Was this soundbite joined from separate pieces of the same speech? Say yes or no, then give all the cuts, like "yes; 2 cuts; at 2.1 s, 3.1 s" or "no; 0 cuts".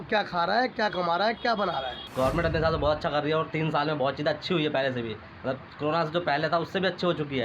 yes; 1 cut; at 2.0 s